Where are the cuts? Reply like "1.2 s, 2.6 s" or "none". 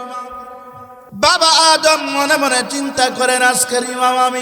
0.9 s